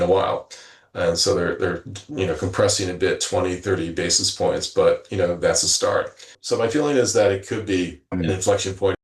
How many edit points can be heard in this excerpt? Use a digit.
2